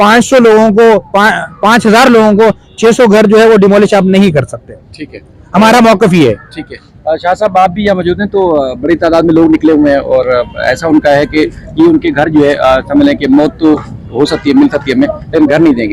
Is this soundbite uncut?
yes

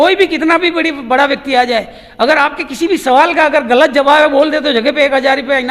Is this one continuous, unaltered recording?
yes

